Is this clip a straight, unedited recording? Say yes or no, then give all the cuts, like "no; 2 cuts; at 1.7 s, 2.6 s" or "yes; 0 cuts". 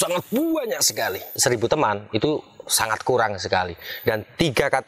no; 1 cut; at 1.3 s